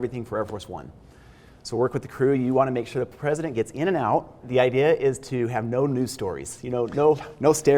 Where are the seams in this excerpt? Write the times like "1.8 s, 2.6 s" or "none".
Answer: 4.4 s

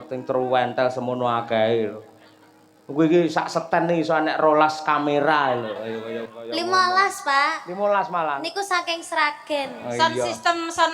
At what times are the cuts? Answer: 6.3 s, 9.8 s

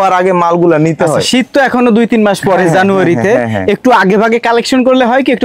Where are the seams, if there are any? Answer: none

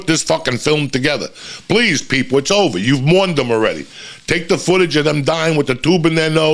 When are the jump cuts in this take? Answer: none

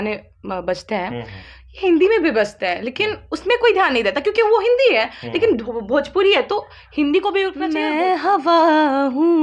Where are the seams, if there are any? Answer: 7.7 s

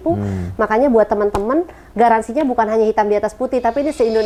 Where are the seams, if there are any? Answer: none

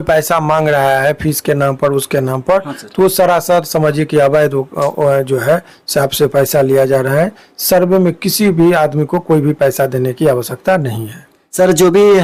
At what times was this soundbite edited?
none

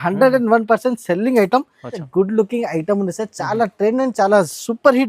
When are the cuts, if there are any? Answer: 2.0 s

